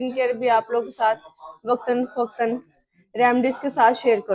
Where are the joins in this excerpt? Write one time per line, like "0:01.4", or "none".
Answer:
none